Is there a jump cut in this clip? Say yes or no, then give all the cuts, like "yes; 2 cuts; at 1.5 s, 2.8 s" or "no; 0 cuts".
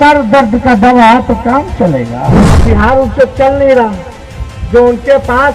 yes; 1 cut; at 2.4 s